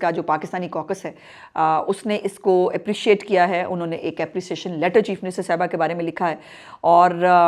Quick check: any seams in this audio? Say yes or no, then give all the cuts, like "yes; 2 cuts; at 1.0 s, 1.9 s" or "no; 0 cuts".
no; 0 cuts